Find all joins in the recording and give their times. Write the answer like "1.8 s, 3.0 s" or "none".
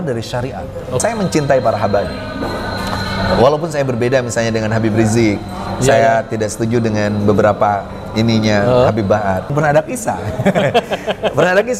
1.0 s, 9.5 s